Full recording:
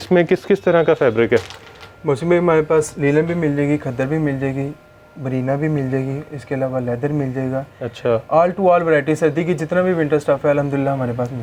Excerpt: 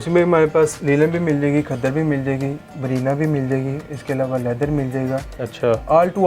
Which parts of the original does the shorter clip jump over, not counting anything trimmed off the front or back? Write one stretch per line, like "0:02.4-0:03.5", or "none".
0:04.8-0:05.1